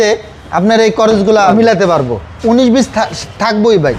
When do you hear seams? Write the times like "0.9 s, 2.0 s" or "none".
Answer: 1.5 s